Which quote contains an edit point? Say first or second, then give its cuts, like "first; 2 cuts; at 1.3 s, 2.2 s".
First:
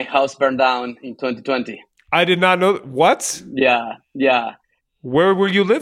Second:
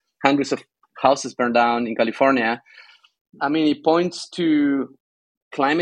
second; 1 cut; at 3.3 s